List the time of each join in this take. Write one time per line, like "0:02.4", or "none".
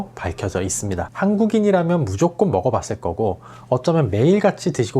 0:01.0